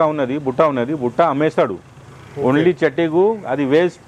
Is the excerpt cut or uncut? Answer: uncut